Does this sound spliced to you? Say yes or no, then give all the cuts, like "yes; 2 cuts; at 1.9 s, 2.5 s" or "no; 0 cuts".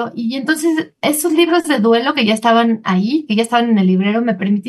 no; 0 cuts